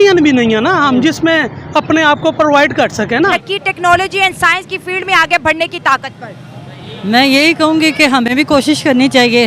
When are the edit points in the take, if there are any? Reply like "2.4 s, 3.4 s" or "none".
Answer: 3.4 s